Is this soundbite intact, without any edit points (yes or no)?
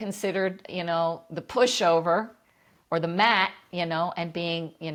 yes